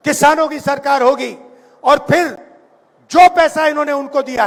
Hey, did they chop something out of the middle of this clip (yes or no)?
no